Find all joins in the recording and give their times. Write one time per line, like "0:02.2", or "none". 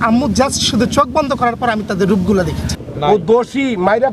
0:02.8